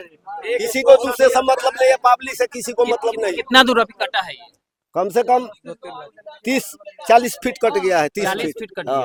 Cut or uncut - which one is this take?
uncut